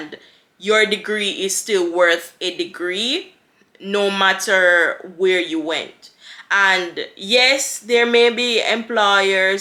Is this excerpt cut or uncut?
uncut